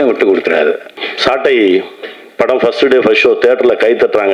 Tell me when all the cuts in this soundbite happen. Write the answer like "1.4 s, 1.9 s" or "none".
0.9 s